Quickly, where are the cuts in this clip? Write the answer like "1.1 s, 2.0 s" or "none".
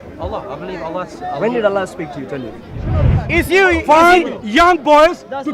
3.2 s